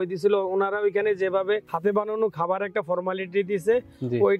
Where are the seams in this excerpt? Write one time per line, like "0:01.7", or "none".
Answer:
0:01.7